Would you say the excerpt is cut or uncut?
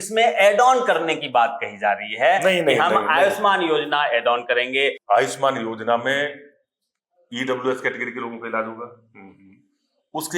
cut